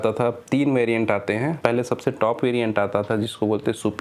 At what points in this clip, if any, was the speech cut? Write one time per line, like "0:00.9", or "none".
none

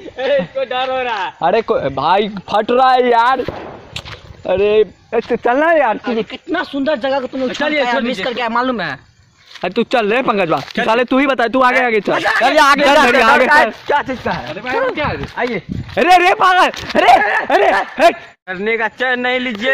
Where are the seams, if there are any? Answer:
0:18.4

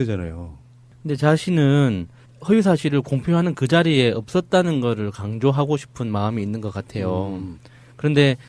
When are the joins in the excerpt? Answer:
0:03.8

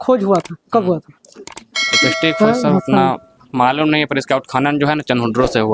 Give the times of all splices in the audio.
none

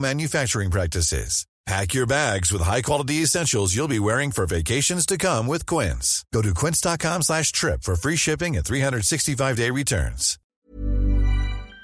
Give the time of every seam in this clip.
0:10.5

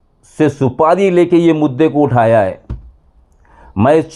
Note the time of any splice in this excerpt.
none

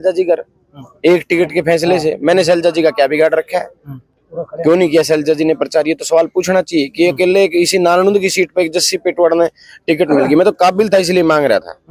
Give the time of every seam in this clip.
none

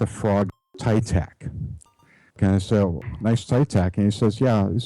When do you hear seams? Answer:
0:02.4

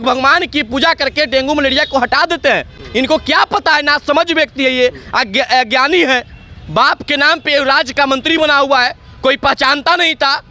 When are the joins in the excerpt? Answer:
none

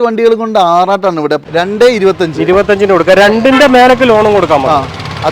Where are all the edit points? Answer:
0:01.4

